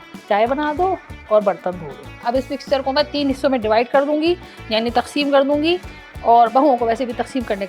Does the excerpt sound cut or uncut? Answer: cut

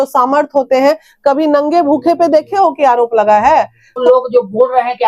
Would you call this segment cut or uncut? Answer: cut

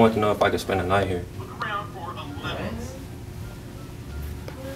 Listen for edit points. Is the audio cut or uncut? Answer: uncut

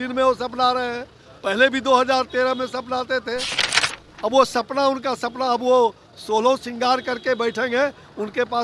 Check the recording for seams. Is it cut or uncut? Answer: uncut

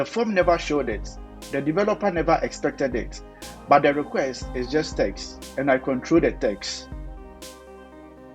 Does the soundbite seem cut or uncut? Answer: cut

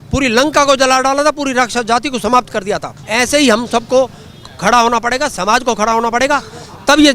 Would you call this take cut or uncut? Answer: cut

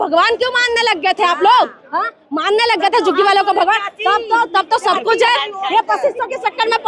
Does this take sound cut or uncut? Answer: uncut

